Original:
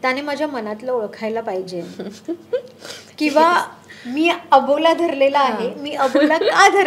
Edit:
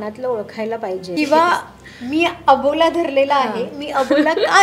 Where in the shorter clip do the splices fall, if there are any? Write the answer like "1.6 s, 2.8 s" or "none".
1.1 s